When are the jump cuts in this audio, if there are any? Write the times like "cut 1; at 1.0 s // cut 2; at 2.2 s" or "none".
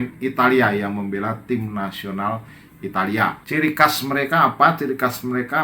cut 1; at 3.4 s

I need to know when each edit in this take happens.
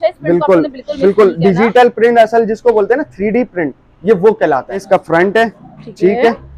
cut 1; at 4.8 s

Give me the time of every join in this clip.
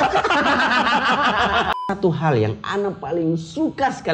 cut 1; at 1.7 s

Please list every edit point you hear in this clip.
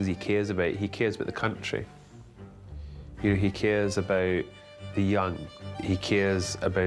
cut 1; at 5.7 s

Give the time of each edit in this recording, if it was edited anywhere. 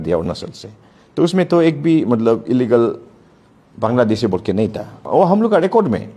none

